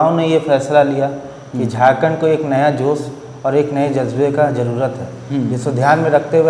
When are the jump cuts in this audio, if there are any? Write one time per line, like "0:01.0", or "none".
none